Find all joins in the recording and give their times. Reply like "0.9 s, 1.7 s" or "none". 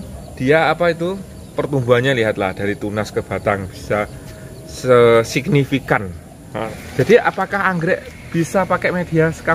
6.6 s